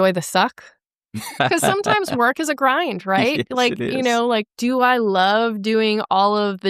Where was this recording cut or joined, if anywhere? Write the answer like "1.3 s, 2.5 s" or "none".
1.3 s